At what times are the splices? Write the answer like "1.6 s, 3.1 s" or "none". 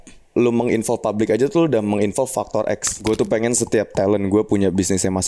2.9 s